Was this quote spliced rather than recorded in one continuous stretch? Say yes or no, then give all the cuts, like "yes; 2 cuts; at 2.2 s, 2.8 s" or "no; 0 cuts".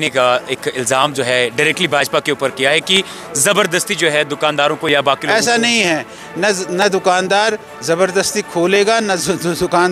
no; 0 cuts